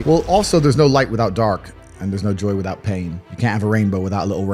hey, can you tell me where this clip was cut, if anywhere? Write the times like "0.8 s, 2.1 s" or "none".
3.2 s